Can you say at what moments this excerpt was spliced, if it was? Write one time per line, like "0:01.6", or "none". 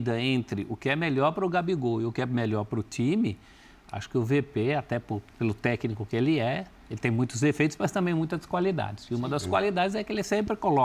none